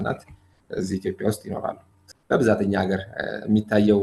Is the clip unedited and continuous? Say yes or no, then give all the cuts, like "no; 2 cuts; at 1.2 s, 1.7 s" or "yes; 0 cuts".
no; 1 cut; at 1.9 s